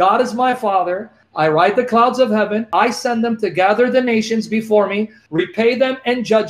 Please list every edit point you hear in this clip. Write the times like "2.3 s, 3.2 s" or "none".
1.2 s, 2.7 s, 5.2 s